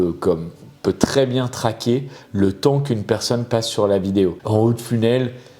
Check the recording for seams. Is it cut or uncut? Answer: cut